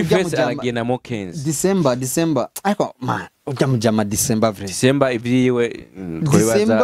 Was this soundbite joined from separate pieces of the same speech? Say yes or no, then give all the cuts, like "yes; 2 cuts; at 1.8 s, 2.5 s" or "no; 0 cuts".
no; 0 cuts